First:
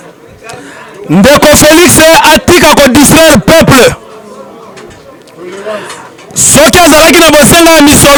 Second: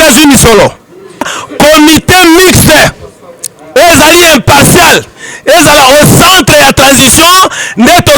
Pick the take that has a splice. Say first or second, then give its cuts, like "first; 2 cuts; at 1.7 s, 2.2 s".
second; 1 cut; at 1.4 s